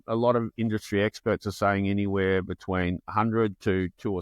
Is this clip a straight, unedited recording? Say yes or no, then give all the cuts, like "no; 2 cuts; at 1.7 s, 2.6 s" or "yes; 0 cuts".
yes; 0 cuts